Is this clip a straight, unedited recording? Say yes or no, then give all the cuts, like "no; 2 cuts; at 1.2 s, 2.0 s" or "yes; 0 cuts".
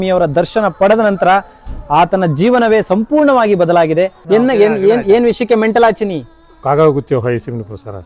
no; 1 cut; at 4.2 s